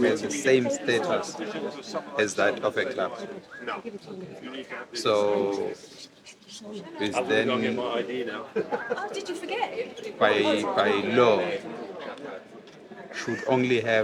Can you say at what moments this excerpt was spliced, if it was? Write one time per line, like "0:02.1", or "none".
none